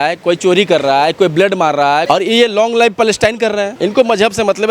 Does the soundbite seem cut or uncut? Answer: cut